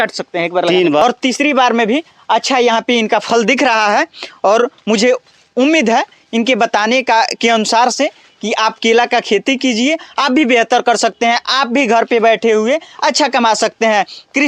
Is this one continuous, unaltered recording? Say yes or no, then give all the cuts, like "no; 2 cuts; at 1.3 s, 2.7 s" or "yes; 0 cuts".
no; 1 cut; at 1.0 s